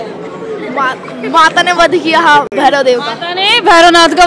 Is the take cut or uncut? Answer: uncut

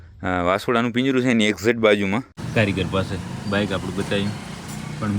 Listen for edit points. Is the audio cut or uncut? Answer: cut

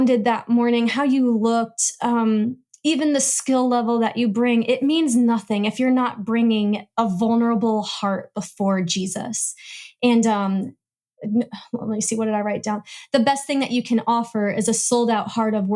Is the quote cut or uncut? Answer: uncut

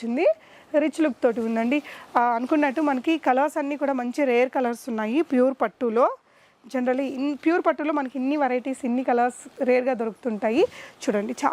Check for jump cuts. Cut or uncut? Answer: uncut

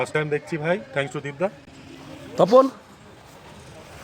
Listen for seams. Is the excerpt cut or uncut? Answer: uncut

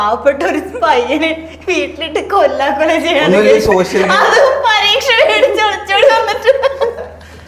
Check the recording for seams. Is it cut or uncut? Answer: uncut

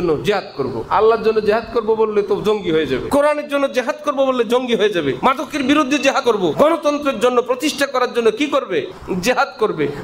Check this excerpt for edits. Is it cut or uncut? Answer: cut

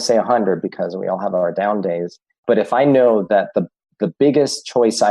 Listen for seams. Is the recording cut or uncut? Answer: cut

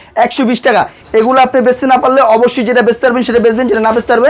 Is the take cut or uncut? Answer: cut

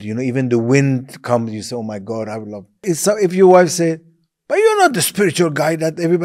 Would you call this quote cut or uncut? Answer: cut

